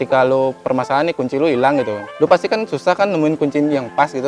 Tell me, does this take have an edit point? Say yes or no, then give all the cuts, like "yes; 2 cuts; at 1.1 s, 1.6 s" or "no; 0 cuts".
yes; 2 cuts; at 2.1 s, 3.4 s